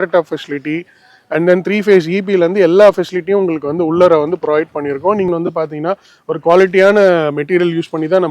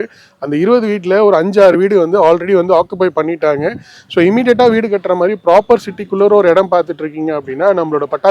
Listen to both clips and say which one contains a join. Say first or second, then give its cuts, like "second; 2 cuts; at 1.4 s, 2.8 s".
first; 1 cut; at 5.3 s